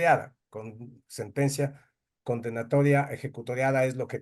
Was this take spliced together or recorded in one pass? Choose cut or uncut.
uncut